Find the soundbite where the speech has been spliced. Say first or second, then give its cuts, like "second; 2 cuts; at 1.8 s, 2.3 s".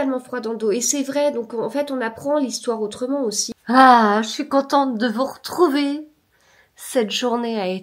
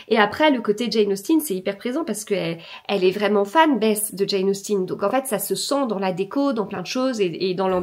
first; 1 cut; at 3.4 s